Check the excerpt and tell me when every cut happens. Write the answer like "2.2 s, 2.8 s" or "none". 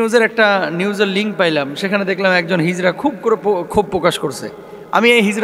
none